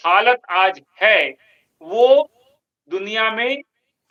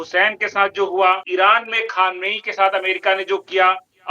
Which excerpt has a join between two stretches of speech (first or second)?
second